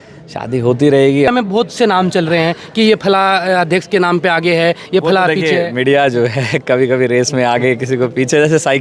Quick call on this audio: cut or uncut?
cut